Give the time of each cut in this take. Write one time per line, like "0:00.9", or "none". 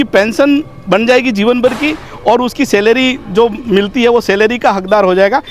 none

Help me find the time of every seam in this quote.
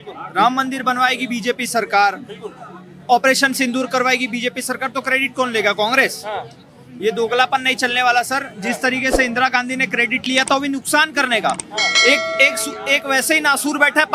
none

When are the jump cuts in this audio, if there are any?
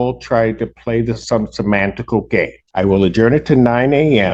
0:02.6

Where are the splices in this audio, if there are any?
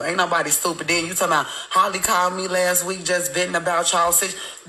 none

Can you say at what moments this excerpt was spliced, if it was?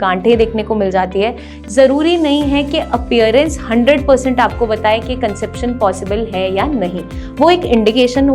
0:01.5

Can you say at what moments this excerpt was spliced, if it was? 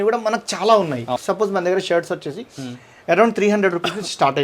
0:01.2

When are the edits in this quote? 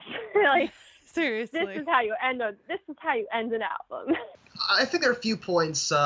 0:04.2

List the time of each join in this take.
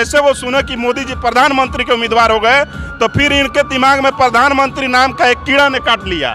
0:00.9

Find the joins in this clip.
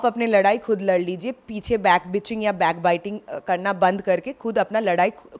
none

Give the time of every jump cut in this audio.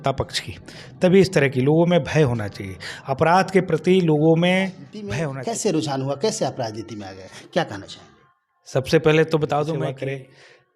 0:05.0
0:09.9

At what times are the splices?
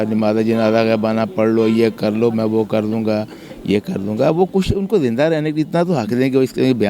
none

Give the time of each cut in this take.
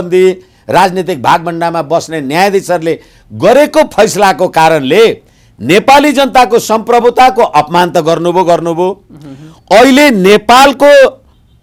none

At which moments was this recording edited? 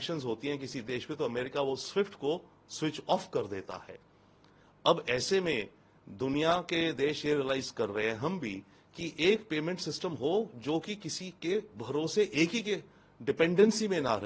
none

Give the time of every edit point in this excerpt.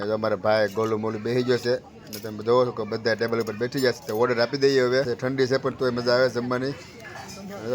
0:05.1

